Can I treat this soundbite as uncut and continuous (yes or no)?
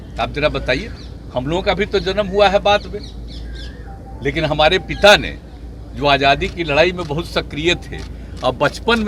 yes